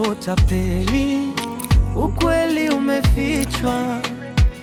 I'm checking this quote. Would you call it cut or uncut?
uncut